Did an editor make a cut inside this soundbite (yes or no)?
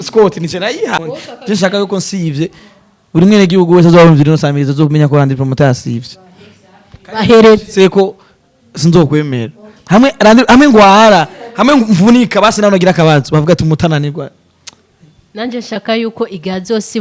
yes